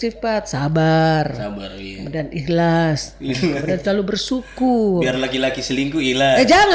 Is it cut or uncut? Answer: uncut